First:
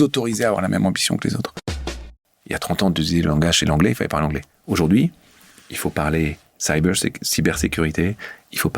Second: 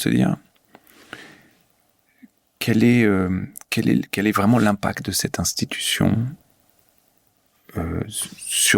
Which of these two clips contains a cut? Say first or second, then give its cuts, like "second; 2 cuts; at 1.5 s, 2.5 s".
first; 1 cut; at 2.0 s